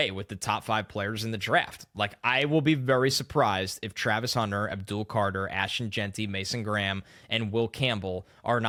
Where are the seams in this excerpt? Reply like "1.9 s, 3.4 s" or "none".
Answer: none